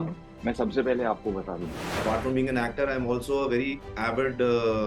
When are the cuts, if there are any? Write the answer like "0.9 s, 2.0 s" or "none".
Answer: 1.9 s